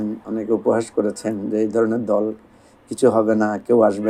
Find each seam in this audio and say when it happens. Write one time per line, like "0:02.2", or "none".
none